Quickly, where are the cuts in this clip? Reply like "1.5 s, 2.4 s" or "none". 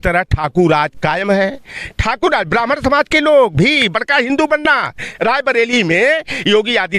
none